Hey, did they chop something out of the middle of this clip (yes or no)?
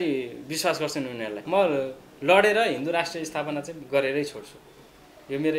yes